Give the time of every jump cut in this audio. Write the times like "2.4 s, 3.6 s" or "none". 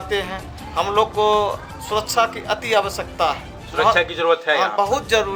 none